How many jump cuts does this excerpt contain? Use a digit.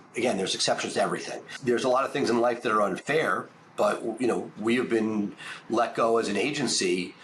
1